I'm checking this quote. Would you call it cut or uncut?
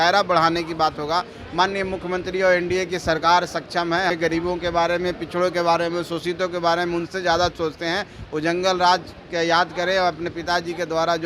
cut